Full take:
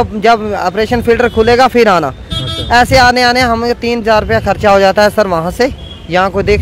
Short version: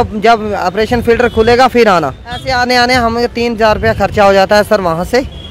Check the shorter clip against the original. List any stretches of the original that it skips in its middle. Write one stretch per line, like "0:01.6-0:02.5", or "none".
0:02.5-0:03.0